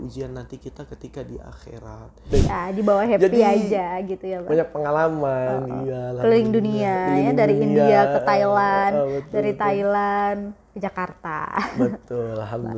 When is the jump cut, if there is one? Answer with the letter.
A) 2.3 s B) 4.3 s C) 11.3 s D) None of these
A